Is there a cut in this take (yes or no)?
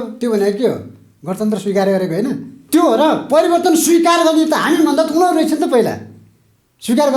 yes